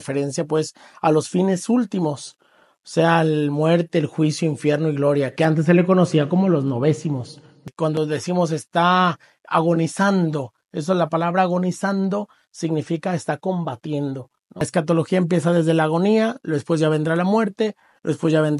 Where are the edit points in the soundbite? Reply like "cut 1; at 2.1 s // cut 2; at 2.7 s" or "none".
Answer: cut 1; at 7.7 s // cut 2; at 14.7 s